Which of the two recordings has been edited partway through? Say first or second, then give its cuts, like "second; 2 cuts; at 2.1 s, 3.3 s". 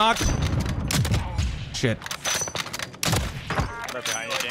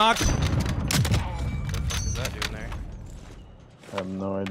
first; 1 cut; at 1.4 s